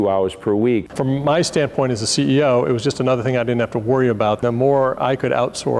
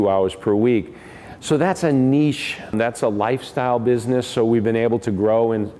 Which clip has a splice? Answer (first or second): first